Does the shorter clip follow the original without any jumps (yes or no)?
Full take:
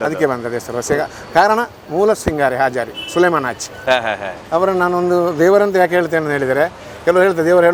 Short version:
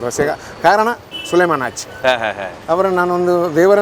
no